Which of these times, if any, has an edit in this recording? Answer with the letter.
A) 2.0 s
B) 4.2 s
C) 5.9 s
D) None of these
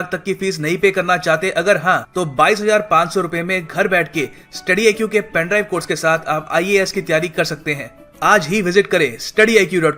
D